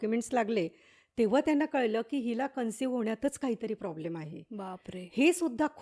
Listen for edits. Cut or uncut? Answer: uncut